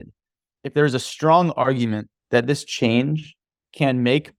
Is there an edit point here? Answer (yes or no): no